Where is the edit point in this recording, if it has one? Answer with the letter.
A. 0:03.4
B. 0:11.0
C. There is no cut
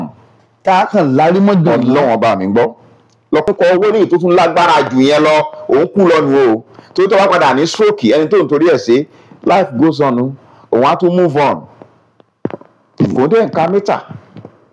A